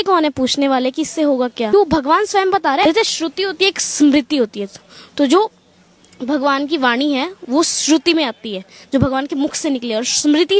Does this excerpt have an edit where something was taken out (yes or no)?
yes